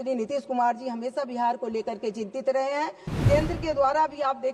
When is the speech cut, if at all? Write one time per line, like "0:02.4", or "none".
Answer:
0:03.1